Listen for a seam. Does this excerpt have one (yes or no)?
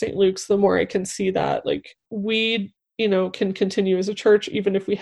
yes